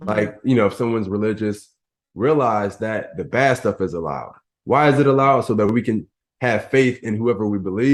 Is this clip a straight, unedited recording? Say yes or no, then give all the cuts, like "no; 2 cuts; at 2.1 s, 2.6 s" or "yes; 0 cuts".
yes; 0 cuts